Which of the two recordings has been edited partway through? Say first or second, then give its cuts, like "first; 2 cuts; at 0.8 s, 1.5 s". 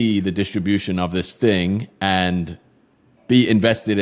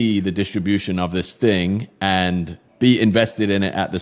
second; 1 cut; at 2.6 s